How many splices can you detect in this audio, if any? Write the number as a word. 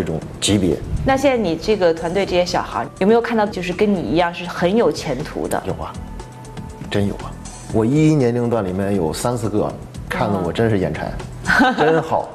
one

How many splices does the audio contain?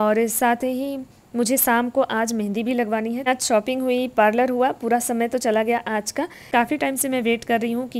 two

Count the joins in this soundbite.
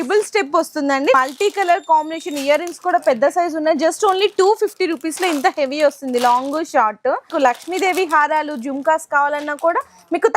two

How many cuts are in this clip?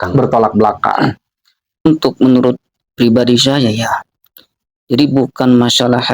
one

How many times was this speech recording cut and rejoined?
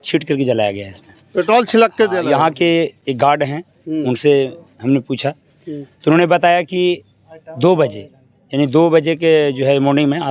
zero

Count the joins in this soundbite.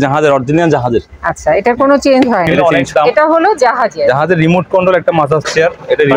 one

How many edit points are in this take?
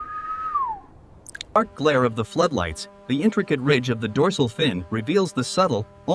one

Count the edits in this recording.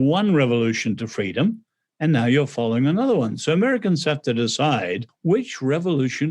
one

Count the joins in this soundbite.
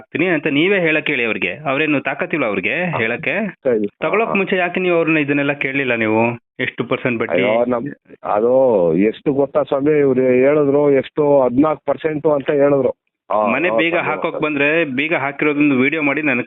two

